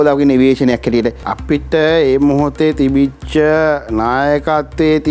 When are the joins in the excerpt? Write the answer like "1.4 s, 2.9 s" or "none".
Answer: 1.3 s